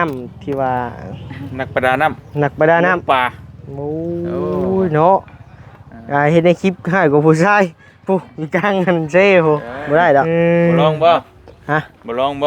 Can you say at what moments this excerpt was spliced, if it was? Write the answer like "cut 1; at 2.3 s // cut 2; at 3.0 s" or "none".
cut 1; at 10.8 s